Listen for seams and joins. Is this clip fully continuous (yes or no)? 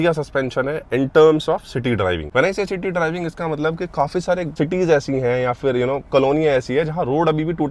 yes